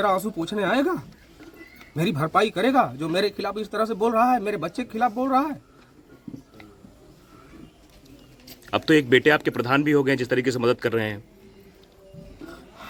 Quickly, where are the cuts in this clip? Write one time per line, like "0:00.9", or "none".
none